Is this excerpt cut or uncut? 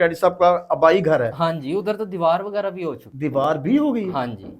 cut